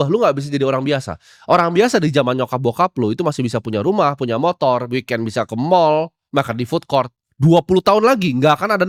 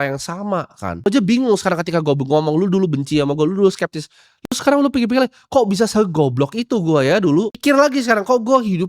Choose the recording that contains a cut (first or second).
second